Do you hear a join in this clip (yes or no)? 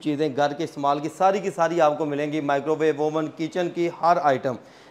no